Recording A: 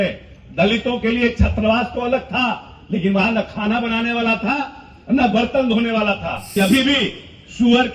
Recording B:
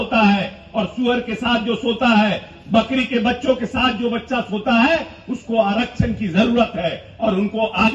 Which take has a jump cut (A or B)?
A